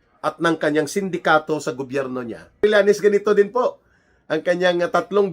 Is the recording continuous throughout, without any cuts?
no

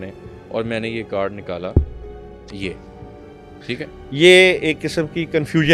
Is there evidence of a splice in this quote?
no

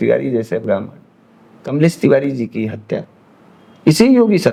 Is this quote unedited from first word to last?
yes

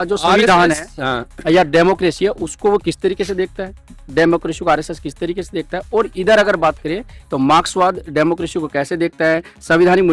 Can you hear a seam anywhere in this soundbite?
no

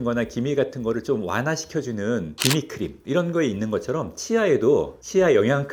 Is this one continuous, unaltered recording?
yes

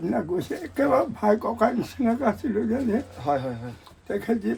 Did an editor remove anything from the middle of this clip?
no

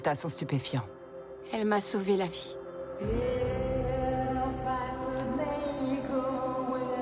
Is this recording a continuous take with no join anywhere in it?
no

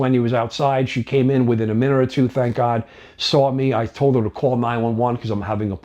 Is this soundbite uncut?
yes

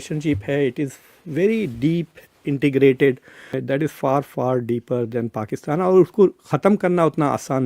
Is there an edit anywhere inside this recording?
yes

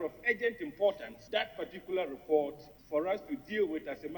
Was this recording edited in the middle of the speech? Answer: yes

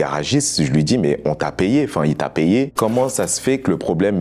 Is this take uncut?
yes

